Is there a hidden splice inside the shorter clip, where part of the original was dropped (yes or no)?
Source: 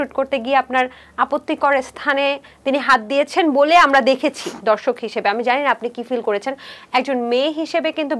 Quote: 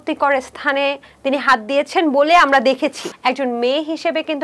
yes